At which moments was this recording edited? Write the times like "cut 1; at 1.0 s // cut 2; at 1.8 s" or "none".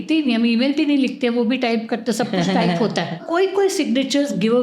cut 1; at 3.2 s

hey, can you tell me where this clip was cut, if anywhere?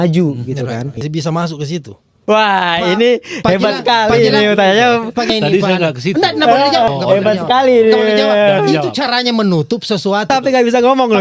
cut 1; at 1.1 s // cut 2; at 10.3 s

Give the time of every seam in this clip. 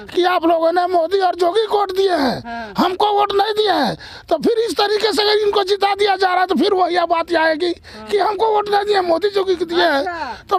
none

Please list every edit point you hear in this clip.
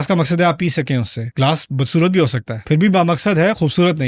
cut 1; at 1.2 s // cut 2; at 2.5 s

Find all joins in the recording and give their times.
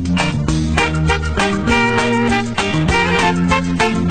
none

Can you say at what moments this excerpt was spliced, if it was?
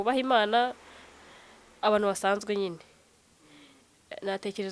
none

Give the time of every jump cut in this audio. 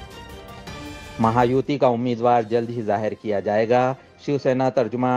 cut 1; at 1.1 s

